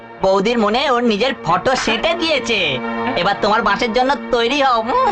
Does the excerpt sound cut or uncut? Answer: uncut